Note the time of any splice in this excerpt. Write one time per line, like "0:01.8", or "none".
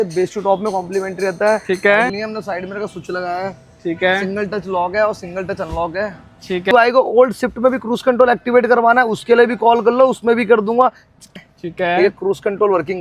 0:02.1
0:06.7
0:11.4